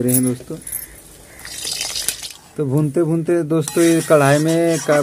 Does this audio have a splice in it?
yes; 1 cut; at 2.5 s

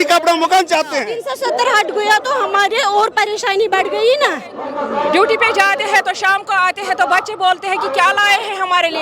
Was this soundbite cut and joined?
yes; 2 cuts; at 1.2 s, 4.7 s

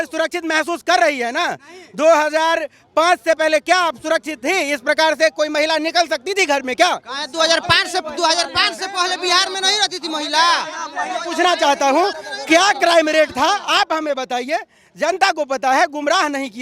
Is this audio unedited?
yes; 0 cuts

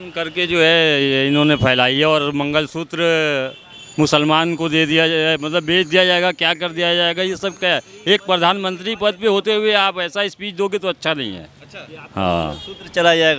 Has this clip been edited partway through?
no; 0 cuts

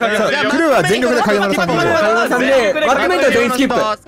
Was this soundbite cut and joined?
no; 0 cuts

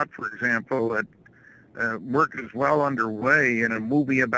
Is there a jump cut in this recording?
yes; 1 cut; at 2.1 s

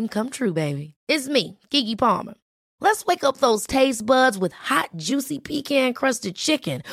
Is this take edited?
no; 0 cuts

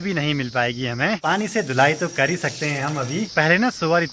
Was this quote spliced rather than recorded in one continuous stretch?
yes; 2 cuts; at 1.2 s, 3.3 s

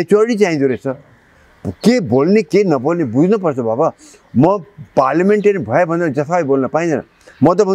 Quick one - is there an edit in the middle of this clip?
no; 0 cuts

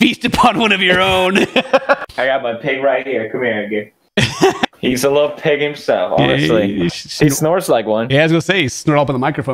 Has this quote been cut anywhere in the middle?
yes; 2 cuts; at 2.0 s, 4.7 s

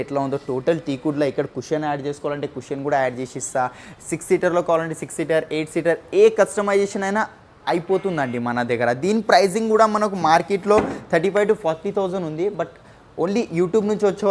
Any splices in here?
no; 0 cuts

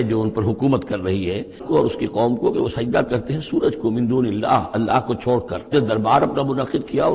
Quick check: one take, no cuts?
no; 2 cuts; at 1.6 s, 5.7 s

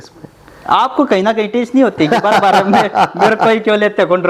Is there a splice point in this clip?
no; 0 cuts

